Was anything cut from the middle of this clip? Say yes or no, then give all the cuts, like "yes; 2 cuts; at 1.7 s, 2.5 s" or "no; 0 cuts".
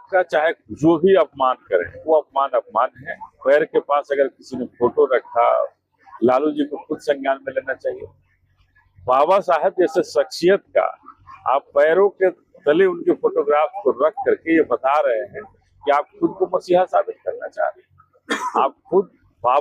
no; 0 cuts